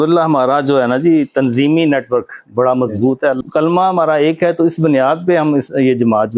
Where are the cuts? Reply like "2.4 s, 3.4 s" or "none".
3.4 s